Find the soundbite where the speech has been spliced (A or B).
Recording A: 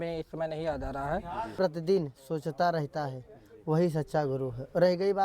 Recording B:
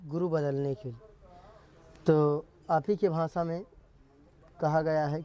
A